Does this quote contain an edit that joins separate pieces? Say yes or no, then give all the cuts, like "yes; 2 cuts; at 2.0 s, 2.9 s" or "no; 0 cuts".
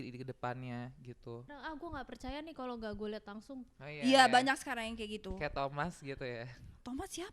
yes; 1 cut; at 1.5 s